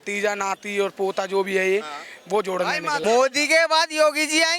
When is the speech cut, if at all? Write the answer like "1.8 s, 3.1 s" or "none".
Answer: 3.0 s